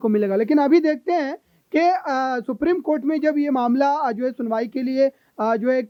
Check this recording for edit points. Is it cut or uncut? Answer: uncut